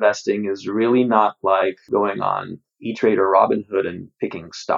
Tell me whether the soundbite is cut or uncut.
cut